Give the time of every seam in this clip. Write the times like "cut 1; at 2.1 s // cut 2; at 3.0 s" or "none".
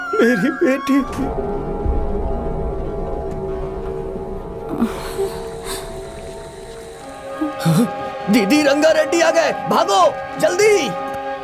cut 1; at 1.1 s // cut 2; at 7.1 s

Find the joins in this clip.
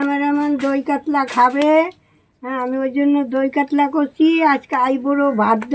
none

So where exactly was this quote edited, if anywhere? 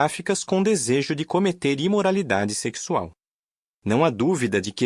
none

